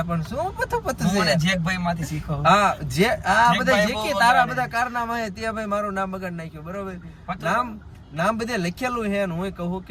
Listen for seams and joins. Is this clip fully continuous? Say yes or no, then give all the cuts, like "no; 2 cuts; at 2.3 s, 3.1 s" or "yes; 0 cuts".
yes; 0 cuts